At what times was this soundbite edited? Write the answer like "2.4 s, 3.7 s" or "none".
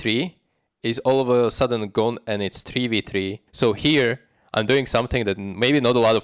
3.4 s